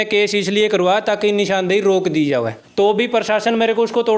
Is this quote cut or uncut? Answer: cut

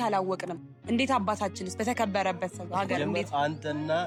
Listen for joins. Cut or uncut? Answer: uncut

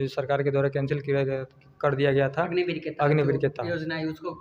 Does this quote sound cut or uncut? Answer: uncut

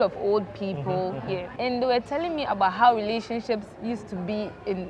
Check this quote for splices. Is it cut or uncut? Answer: cut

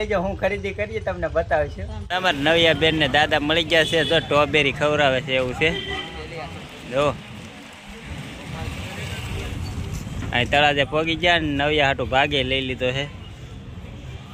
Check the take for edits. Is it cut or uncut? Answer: uncut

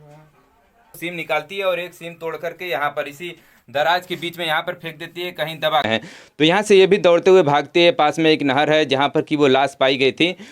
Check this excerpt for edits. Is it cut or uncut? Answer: cut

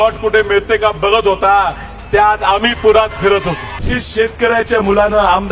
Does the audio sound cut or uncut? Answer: cut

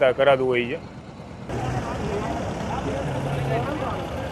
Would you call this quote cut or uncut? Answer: cut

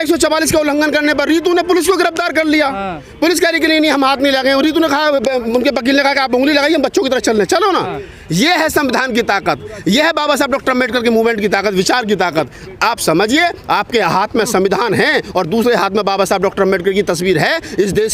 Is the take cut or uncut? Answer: uncut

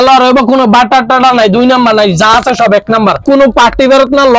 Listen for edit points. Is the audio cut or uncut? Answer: cut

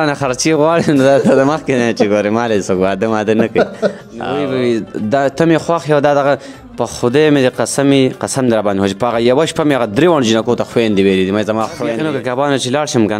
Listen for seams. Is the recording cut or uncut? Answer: cut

